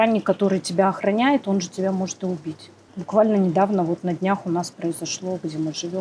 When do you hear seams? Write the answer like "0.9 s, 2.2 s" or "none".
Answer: 2.9 s